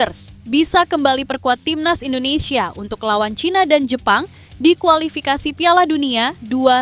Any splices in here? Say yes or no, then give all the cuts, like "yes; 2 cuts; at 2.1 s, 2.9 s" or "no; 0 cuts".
no; 0 cuts